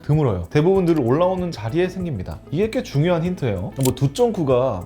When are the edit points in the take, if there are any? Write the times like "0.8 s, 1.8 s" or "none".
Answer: 3.7 s